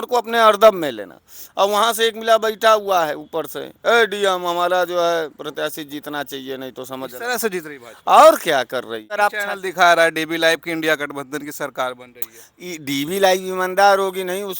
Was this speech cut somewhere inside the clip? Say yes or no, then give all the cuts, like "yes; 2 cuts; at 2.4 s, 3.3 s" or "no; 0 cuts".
yes; 1 cut; at 9.2 s